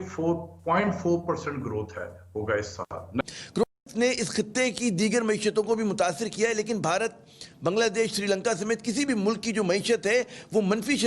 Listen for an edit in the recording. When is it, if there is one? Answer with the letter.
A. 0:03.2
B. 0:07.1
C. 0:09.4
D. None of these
A